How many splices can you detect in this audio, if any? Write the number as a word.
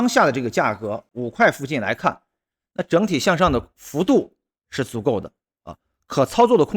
one